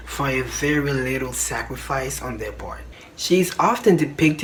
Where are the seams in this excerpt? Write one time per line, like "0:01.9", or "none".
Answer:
none